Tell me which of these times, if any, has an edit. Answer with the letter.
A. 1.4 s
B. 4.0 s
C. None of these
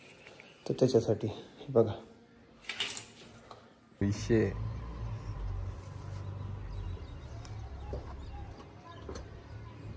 B